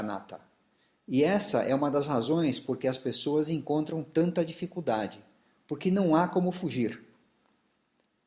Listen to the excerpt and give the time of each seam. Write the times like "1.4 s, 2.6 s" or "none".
3.2 s